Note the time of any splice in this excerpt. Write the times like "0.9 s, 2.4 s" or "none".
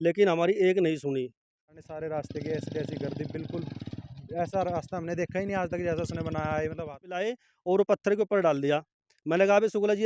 1.7 s, 7.2 s